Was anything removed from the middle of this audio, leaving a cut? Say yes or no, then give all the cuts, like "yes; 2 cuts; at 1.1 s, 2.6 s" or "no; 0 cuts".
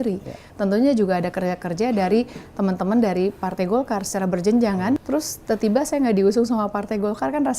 yes; 1 cut; at 5.0 s